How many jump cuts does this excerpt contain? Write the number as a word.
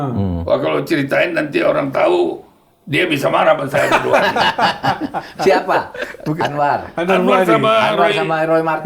zero